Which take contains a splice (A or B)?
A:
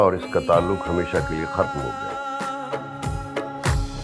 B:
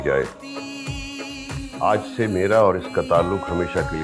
B